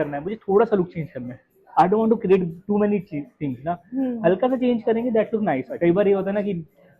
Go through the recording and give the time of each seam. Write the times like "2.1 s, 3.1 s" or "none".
5.7 s